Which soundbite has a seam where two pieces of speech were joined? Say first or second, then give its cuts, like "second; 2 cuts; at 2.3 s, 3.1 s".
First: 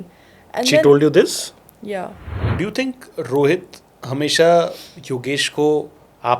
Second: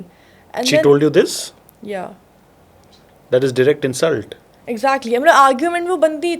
first; 1 cut; at 2.4 s